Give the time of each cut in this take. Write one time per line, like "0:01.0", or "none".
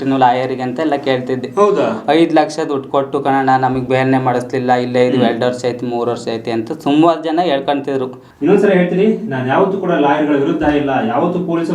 0:08.2